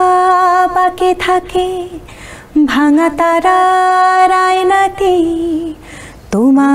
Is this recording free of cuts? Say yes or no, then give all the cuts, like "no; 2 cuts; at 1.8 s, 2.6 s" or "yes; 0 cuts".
yes; 0 cuts